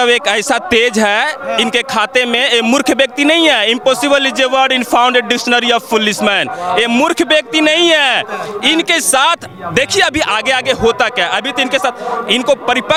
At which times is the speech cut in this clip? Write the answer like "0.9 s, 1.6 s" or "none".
none